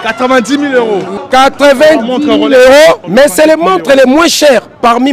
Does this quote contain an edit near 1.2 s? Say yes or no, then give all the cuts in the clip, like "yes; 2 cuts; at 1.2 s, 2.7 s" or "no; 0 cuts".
yes; 2 cuts; at 1.2 s, 3.0 s